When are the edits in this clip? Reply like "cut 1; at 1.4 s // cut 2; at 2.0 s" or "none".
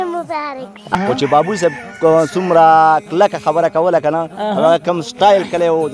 cut 1; at 0.9 s